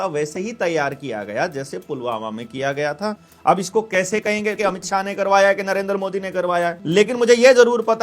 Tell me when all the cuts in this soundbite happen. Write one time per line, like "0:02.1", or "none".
0:03.3
0:04.6
0:06.8